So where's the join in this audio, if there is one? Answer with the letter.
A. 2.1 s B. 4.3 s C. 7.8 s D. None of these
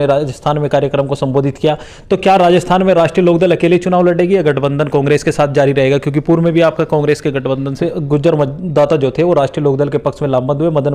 C